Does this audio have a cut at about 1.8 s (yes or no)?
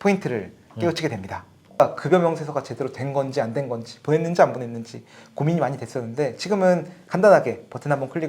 yes